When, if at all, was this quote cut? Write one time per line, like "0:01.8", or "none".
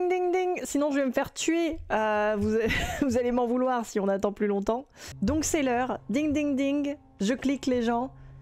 0:05.1